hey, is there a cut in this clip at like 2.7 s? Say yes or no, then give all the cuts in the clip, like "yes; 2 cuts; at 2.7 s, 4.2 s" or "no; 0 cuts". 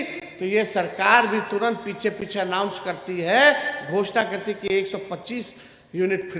no; 0 cuts